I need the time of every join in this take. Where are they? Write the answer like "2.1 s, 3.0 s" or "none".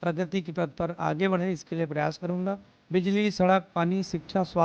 2.7 s